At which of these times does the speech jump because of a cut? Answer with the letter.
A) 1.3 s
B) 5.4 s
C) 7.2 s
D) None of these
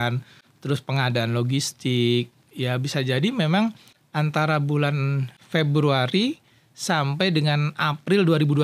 B